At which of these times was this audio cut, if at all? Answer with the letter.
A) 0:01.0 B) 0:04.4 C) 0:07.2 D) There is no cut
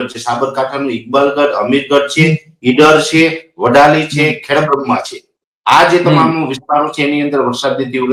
D